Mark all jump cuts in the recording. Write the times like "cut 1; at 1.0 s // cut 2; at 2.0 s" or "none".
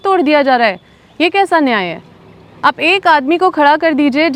none